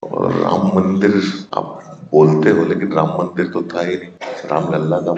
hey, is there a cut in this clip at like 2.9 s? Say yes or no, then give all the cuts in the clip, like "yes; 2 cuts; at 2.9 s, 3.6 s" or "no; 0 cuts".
no; 2 cuts; at 1.4 s, 4.2 s